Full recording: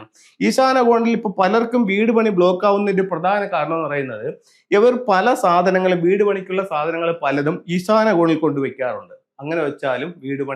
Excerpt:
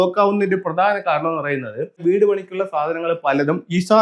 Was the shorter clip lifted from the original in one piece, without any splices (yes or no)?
no